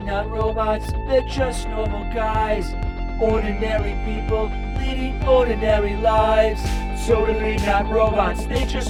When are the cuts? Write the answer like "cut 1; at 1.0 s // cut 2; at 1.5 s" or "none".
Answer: none